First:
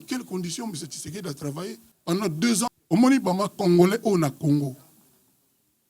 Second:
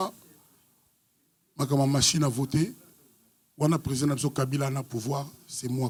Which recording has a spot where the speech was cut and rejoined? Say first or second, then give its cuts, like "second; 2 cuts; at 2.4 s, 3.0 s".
first; 2 cuts; at 1.9 s, 2.7 s